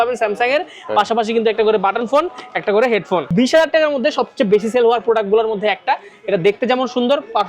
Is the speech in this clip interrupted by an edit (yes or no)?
yes